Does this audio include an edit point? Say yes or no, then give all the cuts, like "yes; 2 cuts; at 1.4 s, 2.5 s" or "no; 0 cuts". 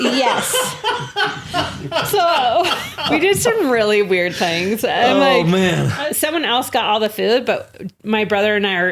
yes; 2 cuts; at 3.0 s, 5.9 s